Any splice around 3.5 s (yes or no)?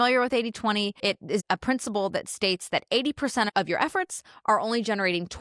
yes